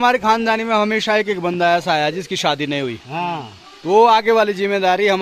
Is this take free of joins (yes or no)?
yes